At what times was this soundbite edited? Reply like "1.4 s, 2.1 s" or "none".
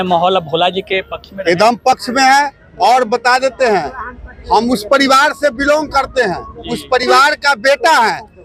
none